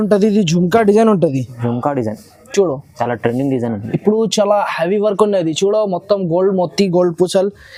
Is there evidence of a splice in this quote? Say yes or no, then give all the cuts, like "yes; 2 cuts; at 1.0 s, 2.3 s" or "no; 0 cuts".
no; 0 cuts